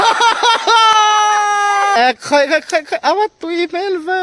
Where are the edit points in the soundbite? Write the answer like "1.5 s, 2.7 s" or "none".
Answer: 1.9 s